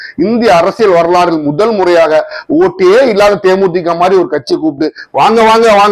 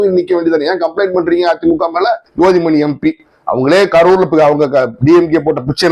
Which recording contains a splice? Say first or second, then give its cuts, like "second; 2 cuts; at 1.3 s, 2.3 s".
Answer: second; 1 cut; at 2.2 s